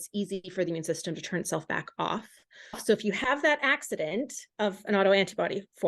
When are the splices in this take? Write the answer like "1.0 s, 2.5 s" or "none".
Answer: 2.8 s